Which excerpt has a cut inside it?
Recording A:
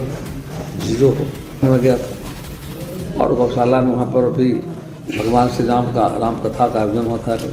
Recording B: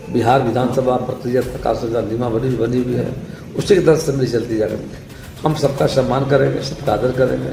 A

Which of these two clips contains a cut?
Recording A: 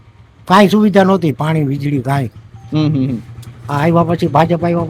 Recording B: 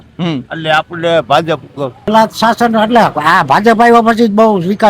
B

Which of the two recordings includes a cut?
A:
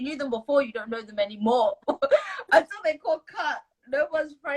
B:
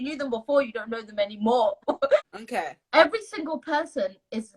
B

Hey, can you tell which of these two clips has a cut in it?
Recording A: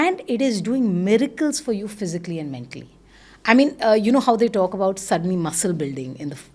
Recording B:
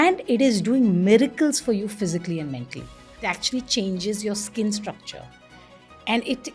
B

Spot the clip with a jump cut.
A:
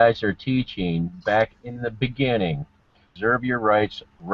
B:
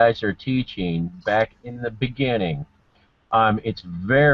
A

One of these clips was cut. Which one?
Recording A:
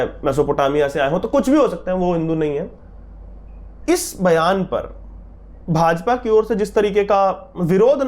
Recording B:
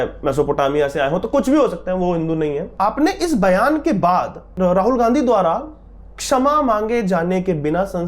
B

